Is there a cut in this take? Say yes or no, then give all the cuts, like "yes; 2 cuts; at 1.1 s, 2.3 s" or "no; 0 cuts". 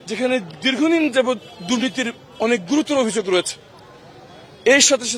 no; 0 cuts